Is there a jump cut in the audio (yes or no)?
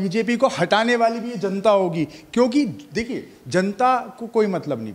no